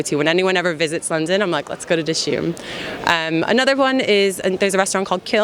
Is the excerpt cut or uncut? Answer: uncut